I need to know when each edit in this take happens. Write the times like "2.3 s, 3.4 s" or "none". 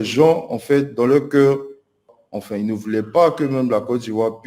2.1 s